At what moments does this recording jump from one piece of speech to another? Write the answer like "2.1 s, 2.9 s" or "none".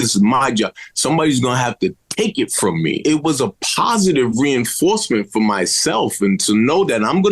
3.0 s